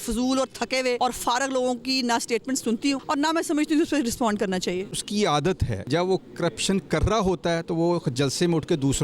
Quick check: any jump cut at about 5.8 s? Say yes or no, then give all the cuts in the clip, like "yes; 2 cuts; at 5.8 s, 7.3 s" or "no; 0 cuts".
yes; 4 cuts; at 1.0 s, 3.0 s, 5.0 s, 5.8 s